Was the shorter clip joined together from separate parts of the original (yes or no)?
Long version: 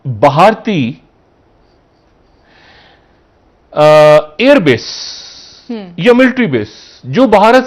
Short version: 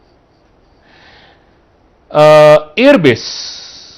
no